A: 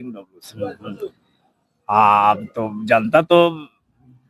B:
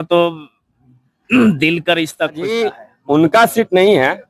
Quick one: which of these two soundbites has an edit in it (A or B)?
B